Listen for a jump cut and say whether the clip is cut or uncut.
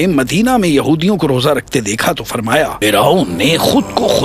cut